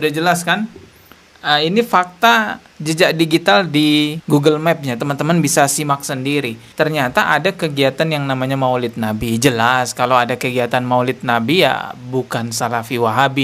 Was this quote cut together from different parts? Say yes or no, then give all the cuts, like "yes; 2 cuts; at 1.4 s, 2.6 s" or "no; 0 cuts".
no; 0 cuts